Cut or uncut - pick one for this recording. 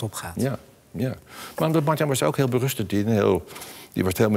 uncut